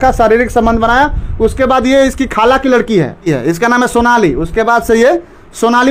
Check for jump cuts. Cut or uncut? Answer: uncut